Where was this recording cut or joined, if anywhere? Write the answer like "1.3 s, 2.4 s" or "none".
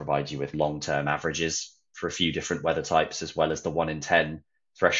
none

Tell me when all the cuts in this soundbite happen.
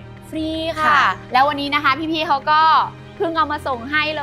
1.2 s

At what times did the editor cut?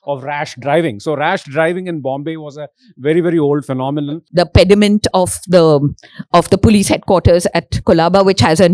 4.2 s

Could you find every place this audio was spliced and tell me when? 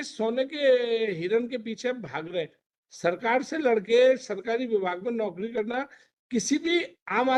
none

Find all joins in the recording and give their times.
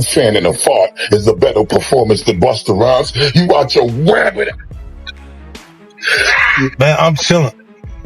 6.7 s

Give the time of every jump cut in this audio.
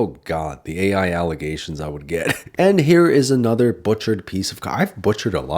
2.4 s

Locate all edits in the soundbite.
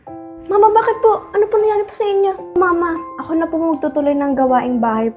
2.6 s

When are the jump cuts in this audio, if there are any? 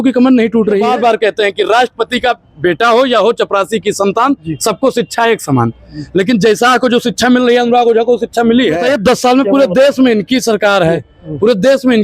0.9 s, 8.8 s

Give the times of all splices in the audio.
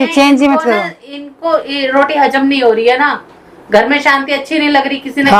none

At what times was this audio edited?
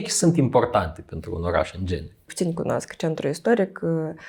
2.3 s

